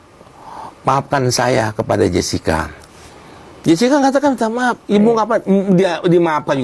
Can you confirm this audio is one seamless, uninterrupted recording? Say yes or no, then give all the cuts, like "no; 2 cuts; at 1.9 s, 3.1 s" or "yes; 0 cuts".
yes; 0 cuts